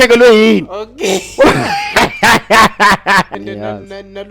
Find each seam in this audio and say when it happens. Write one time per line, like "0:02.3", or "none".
0:03.3